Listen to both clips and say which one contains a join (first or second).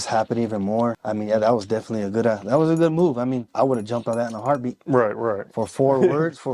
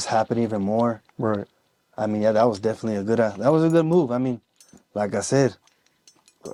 first